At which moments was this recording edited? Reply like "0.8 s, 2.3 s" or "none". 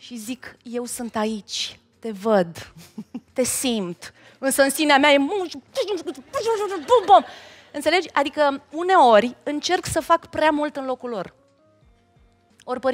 none